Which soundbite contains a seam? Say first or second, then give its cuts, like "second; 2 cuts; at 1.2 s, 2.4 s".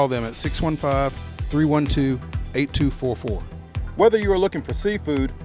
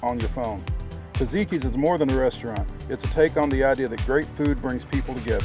first; 1 cut; at 3.8 s